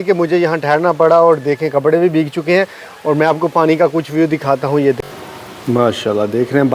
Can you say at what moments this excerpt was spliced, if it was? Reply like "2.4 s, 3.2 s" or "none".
5.0 s